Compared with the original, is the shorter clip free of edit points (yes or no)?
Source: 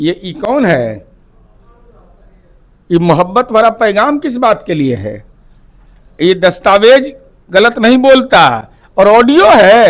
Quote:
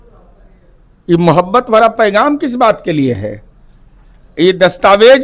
yes